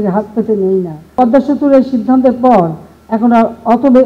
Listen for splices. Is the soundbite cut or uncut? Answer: cut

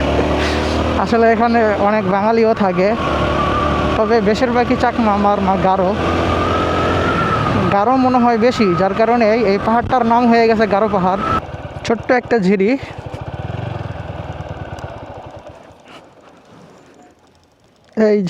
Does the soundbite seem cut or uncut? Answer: cut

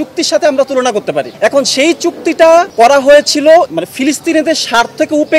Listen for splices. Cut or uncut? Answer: cut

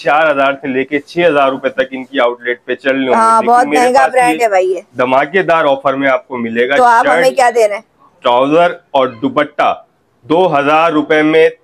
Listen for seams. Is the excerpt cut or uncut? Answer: uncut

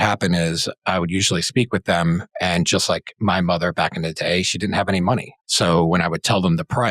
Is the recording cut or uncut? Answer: cut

